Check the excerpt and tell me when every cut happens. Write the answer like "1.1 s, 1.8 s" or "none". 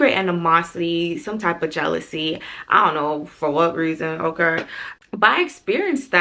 none